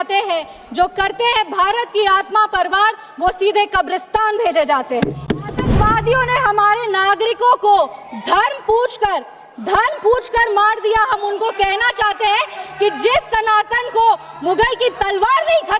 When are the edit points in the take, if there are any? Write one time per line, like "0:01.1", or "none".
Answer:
0:05.7